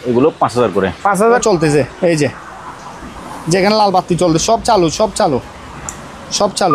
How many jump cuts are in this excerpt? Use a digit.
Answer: 1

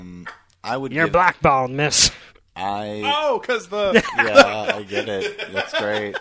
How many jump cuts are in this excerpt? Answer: 0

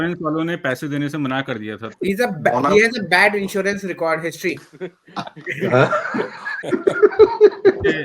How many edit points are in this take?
2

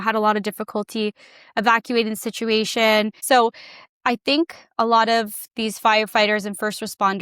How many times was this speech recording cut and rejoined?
1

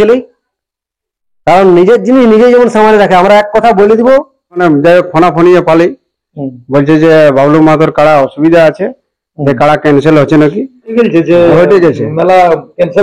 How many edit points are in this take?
2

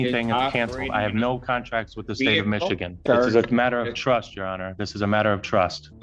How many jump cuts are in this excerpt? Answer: 1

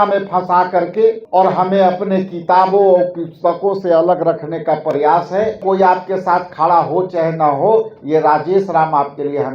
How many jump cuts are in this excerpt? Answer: 2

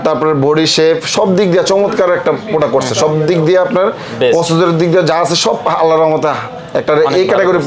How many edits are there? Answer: 0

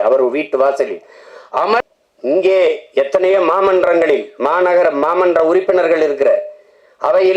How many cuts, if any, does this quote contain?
1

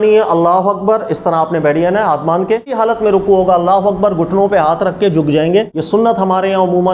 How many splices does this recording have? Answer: 2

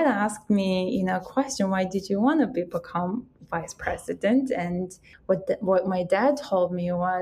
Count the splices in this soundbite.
1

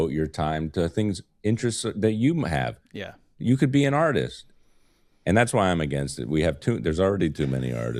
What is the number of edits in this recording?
0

